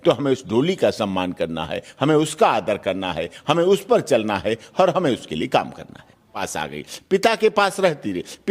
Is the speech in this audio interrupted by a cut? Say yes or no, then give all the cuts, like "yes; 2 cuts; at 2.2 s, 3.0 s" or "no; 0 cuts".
yes; 1 cut; at 6.4 s